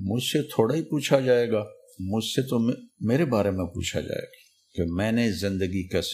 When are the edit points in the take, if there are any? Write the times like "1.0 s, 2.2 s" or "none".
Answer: 2.9 s

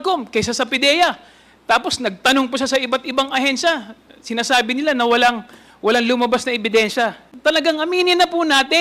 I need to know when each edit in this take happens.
7.3 s

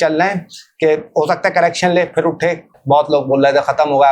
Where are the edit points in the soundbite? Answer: 2.8 s

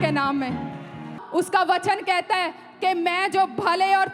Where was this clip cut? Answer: 1.2 s

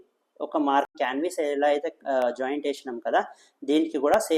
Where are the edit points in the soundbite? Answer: 0.9 s

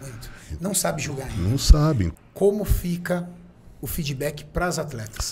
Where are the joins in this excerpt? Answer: 2.1 s

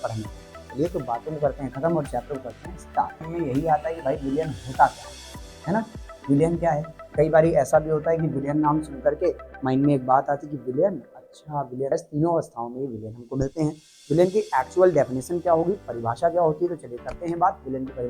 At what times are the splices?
3.2 s, 11.9 s

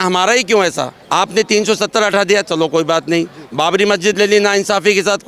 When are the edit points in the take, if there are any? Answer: 0.9 s

